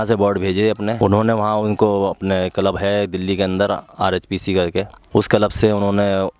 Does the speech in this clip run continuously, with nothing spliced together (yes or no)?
no